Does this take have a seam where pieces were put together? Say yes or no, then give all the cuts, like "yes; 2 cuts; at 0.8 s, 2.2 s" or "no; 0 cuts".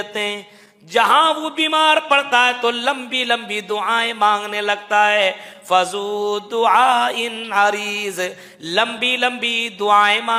no; 0 cuts